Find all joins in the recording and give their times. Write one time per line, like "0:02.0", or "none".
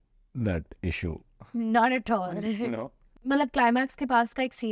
0:03.2